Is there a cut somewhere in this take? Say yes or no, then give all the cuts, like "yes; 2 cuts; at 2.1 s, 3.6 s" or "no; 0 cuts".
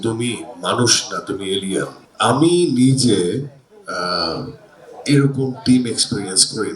yes; 1 cut; at 2.0 s